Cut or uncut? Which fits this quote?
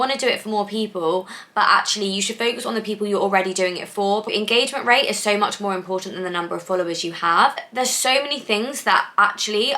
cut